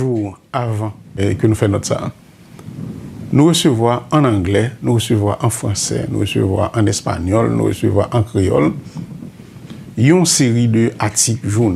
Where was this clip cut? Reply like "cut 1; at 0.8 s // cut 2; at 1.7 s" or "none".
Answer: cut 1; at 1.2 s